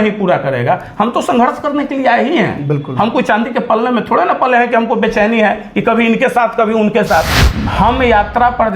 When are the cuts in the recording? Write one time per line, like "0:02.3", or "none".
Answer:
0:07.4